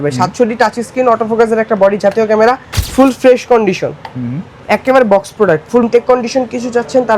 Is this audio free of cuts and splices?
no; 2 cuts; at 2.8 s, 5.8 s

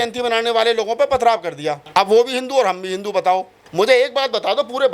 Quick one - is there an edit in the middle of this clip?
yes; 2 cuts; at 1.7 s, 3.6 s

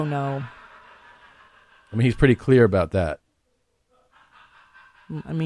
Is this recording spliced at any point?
yes; 1 cut; at 3.3 s

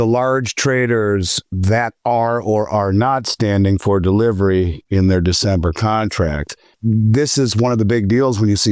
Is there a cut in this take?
yes; 1 cut; at 6.7 s

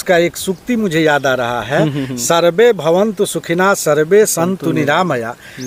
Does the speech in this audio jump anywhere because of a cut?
no; 0 cuts

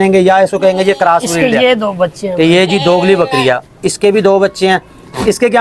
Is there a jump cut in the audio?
no; 0 cuts

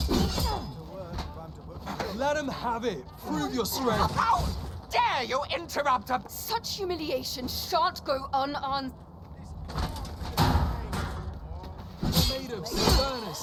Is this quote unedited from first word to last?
yes; 0 cuts

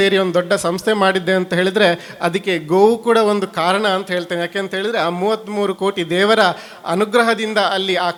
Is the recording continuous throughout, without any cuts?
yes; 0 cuts

